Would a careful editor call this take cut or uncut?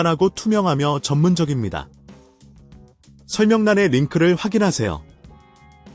cut